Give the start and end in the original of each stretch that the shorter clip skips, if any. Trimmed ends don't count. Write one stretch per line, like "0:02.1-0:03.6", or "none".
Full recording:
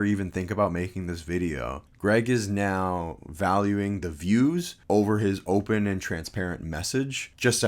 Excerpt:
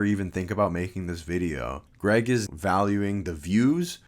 0:02.5-0:03.2